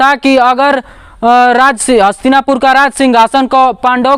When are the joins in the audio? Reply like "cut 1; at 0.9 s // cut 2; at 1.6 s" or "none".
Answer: none